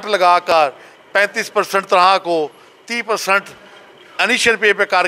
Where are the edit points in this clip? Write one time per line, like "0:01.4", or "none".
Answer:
none